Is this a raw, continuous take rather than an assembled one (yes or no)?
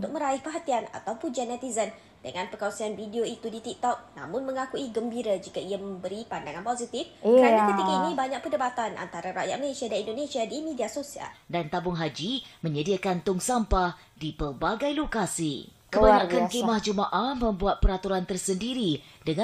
no